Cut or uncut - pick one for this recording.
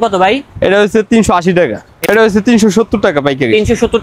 cut